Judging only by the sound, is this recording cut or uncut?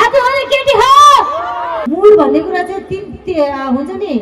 cut